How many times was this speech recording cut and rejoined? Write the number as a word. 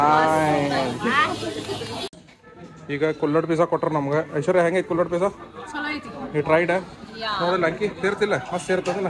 one